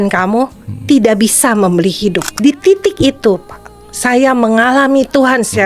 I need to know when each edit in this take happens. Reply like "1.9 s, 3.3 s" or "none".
2.3 s